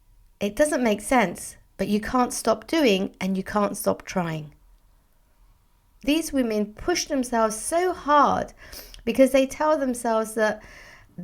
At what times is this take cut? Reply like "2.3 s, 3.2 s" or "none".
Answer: 6.0 s